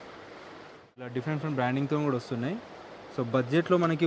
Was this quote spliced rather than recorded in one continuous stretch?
yes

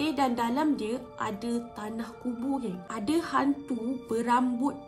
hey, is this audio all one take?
no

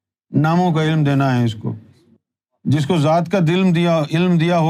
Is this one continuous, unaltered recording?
yes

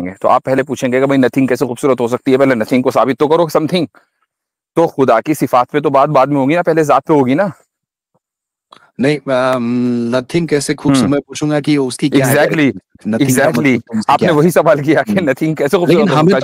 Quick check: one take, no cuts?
yes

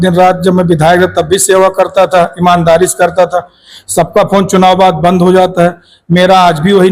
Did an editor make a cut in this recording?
no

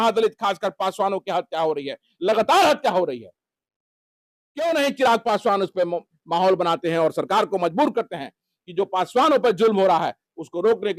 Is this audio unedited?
yes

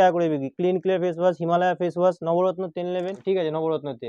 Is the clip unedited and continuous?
no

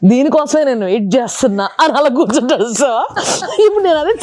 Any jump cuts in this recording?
no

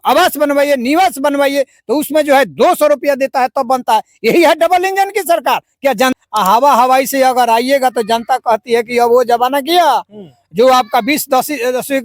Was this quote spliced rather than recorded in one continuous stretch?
yes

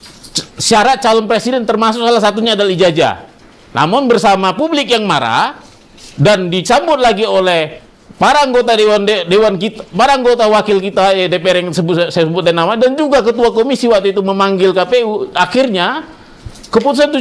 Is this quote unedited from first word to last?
yes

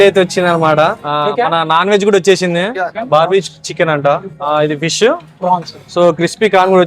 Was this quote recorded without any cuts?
no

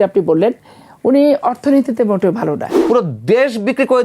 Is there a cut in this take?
yes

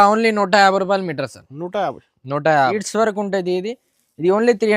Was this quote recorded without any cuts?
no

